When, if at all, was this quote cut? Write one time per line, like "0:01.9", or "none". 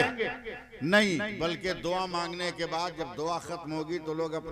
none